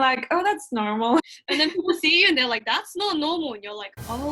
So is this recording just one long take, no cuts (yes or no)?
yes